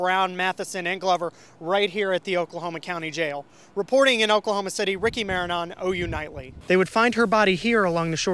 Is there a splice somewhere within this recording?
yes; 1 cut; at 6.6 s

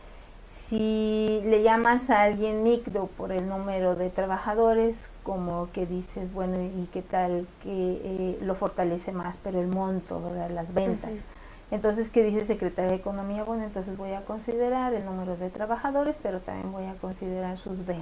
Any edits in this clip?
yes; 1 cut; at 13.5 s

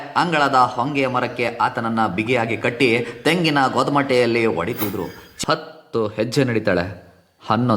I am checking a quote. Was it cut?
yes; 1 cut; at 5.3 s

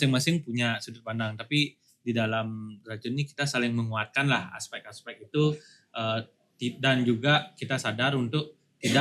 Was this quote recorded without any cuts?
yes; 0 cuts

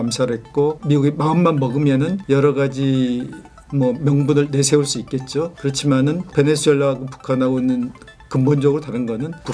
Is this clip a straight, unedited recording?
yes; 0 cuts

